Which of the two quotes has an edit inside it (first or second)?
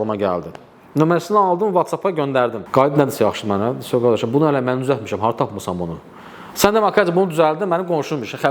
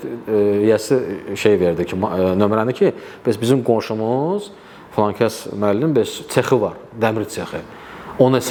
first